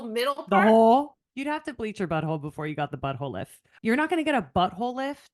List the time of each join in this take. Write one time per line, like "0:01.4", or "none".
0:01.2
0:03.6